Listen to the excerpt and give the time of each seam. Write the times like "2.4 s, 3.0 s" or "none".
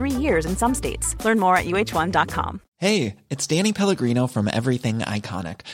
2.6 s